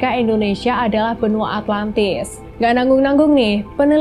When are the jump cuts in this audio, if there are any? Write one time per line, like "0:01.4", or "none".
0:02.3

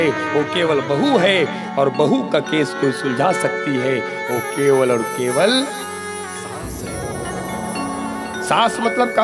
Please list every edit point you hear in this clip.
none

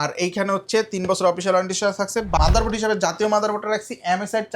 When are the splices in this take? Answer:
0:02.4

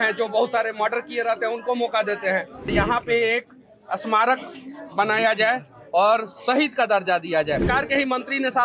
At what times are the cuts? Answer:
0:02.7
0:07.7

